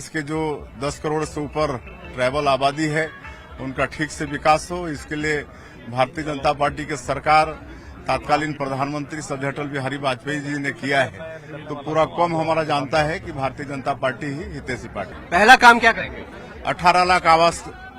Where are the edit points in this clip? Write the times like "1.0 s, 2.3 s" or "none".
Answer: 15.2 s